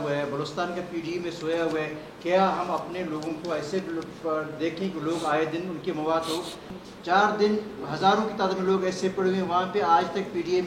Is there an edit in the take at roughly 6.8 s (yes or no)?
yes